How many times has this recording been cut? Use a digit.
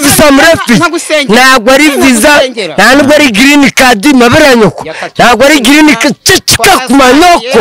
0